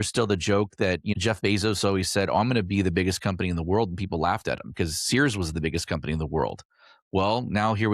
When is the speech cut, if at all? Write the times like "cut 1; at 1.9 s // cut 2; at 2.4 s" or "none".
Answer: cut 1; at 1.1 s

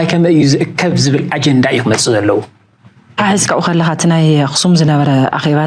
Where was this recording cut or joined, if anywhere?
cut 1; at 3.2 s

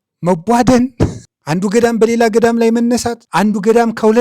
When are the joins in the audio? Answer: cut 1; at 1.2 s // cut 2; at 3.2 s

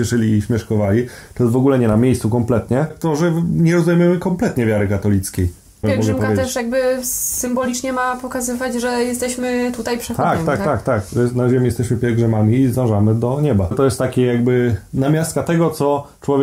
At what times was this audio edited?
cut 1; at 3.0 s // cut 2; at 5.8 s // cut 3; at 13.8 s

